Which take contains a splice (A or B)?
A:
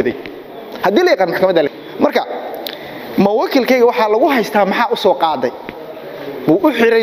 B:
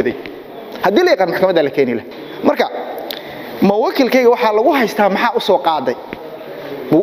A